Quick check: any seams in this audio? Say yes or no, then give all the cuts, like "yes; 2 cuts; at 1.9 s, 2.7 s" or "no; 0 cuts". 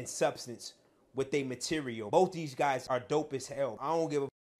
yes; 2 cuts; at 2.0 s, 2.8 s